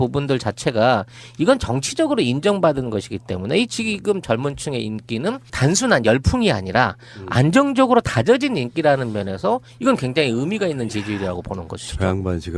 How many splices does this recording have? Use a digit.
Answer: 1